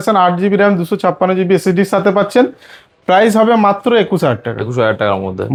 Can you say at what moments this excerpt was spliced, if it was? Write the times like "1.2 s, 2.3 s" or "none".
none